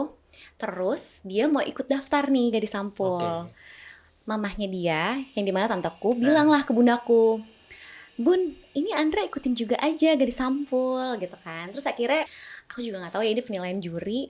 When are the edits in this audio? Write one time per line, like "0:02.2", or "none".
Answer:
0:12.3